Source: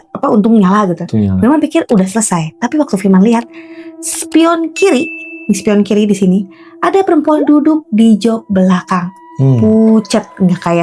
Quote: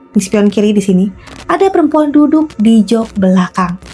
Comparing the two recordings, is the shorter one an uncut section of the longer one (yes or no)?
yes